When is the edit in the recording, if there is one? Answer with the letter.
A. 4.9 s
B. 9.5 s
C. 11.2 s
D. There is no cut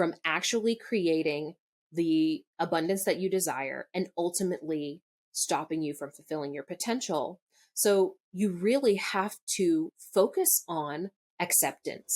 C